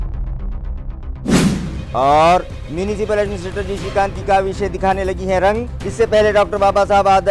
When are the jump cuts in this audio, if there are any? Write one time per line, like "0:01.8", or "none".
none